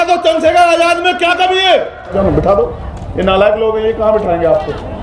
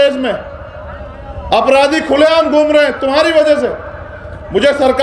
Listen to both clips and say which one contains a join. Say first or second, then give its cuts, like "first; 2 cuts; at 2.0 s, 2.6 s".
first; 1 cut; at 2.1 s